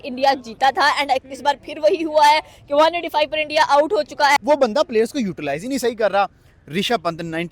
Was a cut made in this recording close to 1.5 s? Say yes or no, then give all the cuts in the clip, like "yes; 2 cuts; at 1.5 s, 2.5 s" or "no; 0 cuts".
no; 1 cut; at 4.4 s